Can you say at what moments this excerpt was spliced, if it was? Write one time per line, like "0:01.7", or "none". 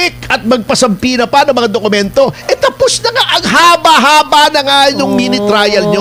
none

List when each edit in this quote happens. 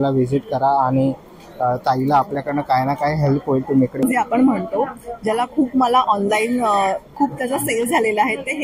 0:04.0

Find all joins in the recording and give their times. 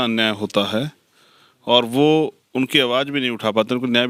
none

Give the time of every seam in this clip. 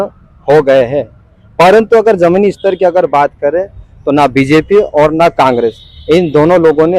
none

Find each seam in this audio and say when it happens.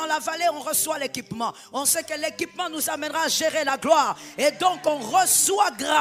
none

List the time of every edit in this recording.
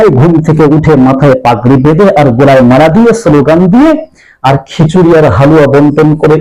none

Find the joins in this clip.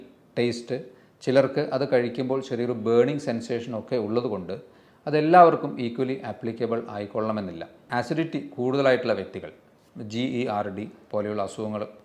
0:07.9

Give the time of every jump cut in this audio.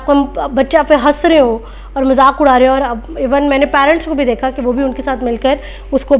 none

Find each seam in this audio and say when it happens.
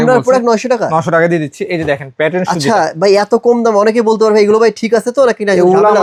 none

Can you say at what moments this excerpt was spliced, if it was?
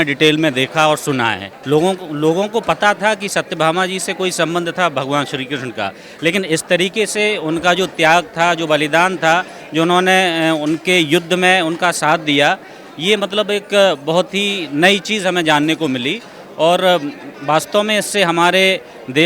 none

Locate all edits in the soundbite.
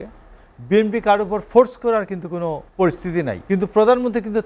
0:02.7
0:03.4

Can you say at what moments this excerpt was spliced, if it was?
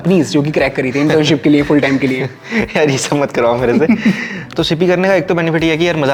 0:04.4

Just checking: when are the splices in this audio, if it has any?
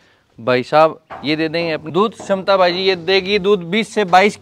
0:01.8

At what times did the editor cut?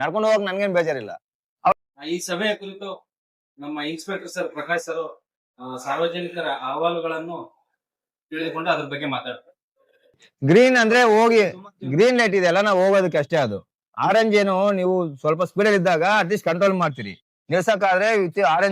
0:01.7
0:10.2

